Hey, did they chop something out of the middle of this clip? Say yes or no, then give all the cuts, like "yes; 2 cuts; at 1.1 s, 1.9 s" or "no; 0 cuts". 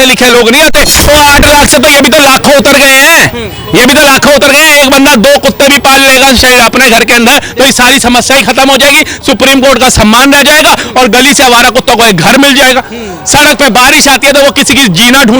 yes; 1 cut; at 1.0 s